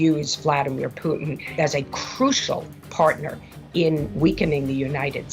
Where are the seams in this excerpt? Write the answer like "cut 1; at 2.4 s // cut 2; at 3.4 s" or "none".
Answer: cut 1; at 1.5 s